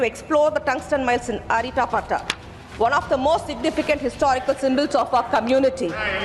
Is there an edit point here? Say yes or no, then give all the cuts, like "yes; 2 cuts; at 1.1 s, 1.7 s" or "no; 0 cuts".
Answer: no; 0 cuts